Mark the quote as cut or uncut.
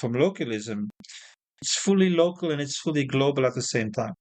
cut